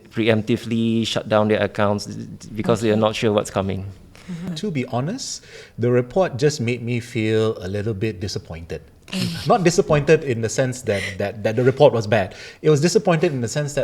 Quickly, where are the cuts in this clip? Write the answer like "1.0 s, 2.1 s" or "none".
4.5 s